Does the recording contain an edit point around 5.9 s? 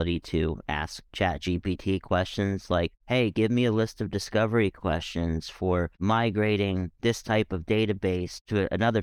no; 0 cuts

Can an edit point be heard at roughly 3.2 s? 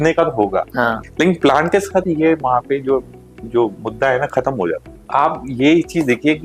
no; 2 cuts; at 1.0 s, 4.9 s

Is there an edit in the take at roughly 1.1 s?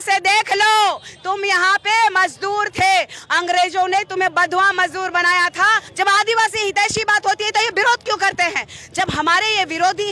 no; 1 cut; at 5.8 s

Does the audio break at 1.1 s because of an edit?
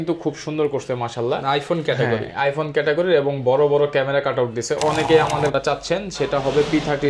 no; 1 cut; at 5.5 s

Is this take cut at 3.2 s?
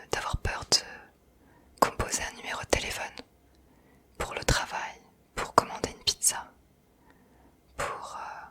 no; 0 cuts

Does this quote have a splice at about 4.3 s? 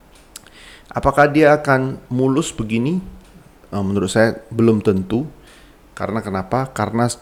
no; 0 cuts

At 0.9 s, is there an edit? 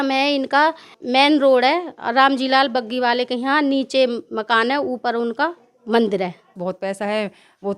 yes; 2 cuts; at 0.9 s, 6.6 s

